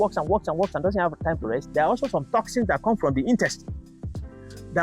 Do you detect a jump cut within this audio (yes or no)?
no